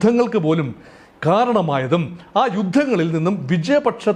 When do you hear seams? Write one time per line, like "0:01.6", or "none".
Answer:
none